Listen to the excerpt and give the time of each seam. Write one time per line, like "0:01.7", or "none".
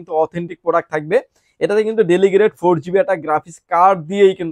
none